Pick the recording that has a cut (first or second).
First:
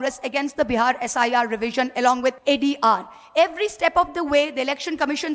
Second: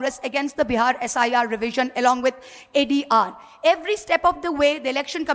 first